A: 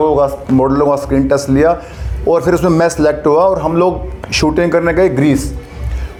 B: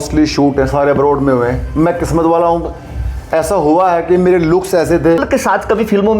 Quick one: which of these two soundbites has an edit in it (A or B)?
B